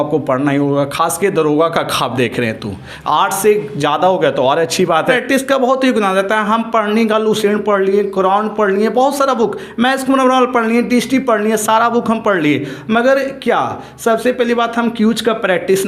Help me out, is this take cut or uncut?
cut